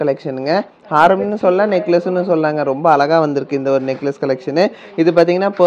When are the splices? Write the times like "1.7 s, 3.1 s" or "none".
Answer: none